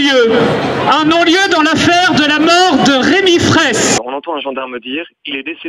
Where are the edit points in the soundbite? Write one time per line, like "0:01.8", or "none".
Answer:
0:04.0